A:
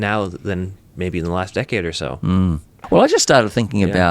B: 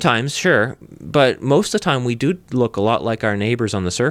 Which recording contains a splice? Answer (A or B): A